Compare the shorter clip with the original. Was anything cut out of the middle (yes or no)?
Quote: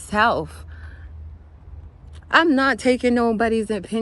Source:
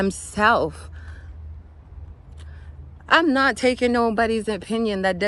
yes